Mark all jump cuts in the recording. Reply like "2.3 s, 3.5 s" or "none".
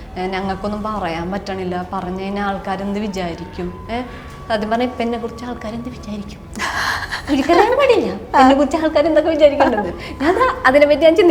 none